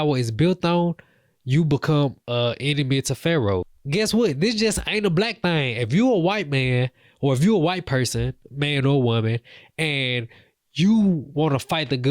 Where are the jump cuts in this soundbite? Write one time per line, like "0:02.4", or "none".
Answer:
0:03.8

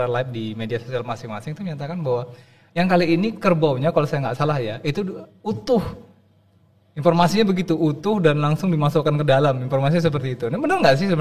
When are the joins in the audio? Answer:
none

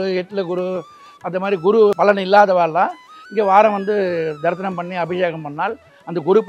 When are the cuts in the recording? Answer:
0:01.9

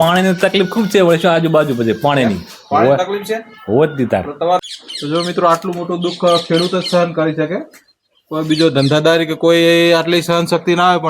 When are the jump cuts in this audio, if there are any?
0:04.7

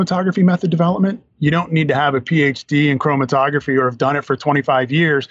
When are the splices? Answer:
none

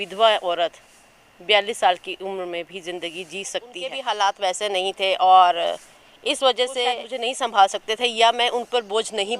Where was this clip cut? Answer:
0:04.0
0:07.1

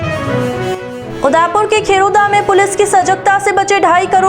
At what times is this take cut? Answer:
0:01.0

